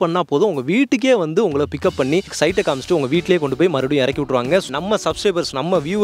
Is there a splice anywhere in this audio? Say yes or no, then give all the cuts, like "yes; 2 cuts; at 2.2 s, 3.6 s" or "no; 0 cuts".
yes; 2 cuts; at 2.3 s, 4.7 s